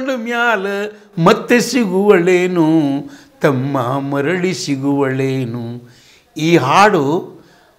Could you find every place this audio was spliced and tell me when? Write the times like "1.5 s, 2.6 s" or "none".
none